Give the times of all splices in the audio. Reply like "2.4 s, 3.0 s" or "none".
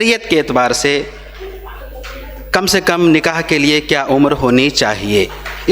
none